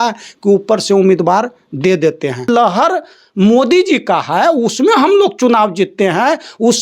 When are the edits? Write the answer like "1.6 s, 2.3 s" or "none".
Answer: 2.5 s